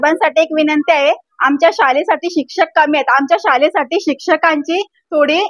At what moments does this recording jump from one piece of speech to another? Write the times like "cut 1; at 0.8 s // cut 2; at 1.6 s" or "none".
none